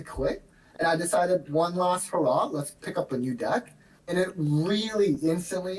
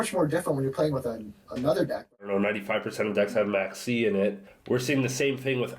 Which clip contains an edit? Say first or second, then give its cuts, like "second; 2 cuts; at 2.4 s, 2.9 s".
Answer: second; 2 cuts; at 2.2 s, 4.5 s